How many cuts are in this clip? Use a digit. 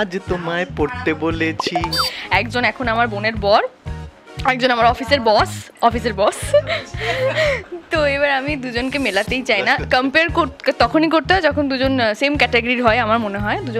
1